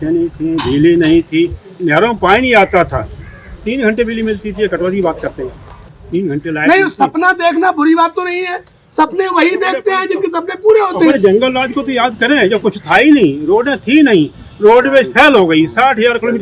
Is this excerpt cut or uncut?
uncut